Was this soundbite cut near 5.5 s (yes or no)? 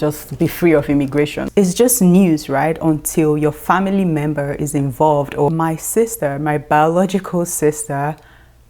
yes